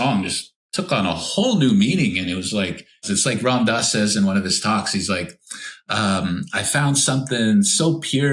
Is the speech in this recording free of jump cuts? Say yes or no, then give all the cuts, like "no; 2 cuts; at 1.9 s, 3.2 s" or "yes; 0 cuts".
no; 1 cut; at 3.0 s